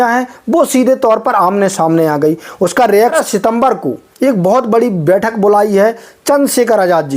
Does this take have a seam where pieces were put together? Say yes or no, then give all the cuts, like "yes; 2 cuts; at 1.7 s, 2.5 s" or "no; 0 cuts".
yes; 1 cut; at 3.1 s